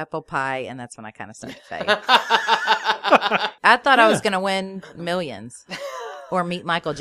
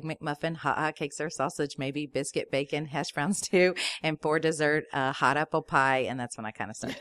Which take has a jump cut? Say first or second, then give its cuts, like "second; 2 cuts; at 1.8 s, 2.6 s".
first; 1 cut; at 3.5 s